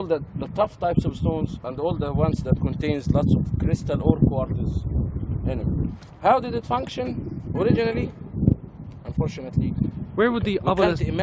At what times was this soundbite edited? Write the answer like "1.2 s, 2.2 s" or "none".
6.6 s